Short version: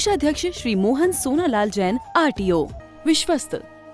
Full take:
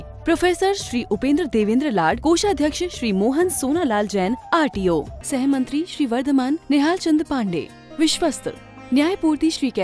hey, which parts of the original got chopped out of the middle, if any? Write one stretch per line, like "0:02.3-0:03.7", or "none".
0:05.2-0:07.7